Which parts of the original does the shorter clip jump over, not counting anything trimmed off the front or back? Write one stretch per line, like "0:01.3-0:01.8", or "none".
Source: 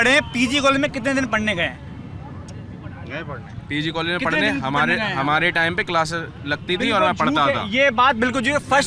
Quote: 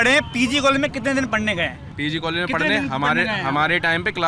0:01.8-0:03.6